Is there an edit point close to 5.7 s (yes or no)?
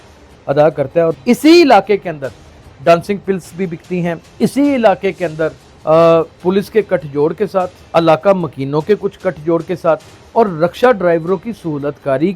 no